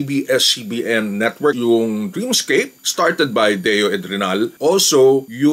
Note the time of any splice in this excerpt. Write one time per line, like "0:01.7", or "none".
0:01.6
0:02.8
0:04.6